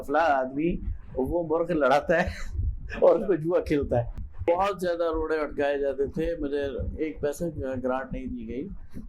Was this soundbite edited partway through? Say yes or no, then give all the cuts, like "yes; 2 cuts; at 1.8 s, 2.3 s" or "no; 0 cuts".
yes; 1 cut; at 4.4 s